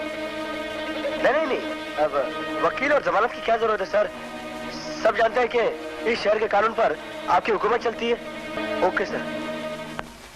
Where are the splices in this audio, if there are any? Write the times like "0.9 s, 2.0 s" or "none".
8.6 s